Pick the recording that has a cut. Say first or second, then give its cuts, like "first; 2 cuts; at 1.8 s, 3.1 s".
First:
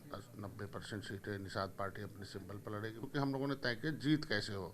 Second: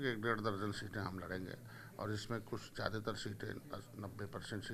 first; 1 cut; at 3.1 s